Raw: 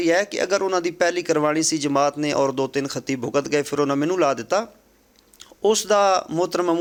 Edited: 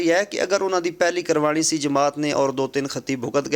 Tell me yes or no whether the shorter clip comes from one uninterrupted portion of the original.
yes